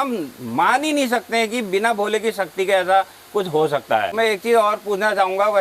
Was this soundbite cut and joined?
yes; 1 cut; at 4.1 s

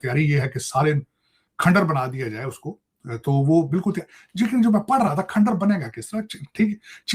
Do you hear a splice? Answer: no; 0 cuts

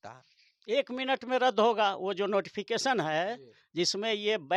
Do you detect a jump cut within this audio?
no; 0 cuts

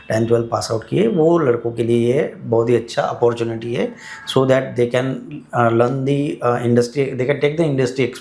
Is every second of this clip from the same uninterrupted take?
yes; 0 cuts

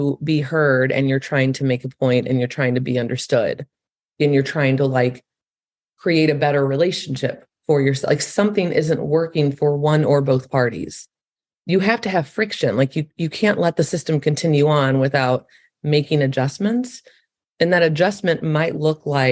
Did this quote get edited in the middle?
no; 0 cuts

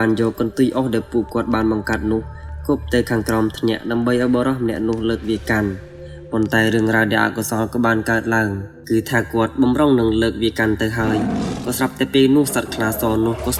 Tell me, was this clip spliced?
no; 0 cuts

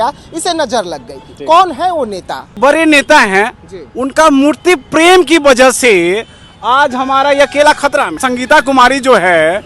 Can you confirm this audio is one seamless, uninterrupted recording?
no; 2 cuts; at 2.5 s, 8.2 s

